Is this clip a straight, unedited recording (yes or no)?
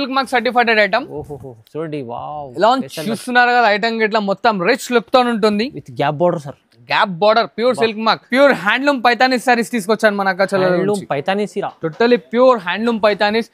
no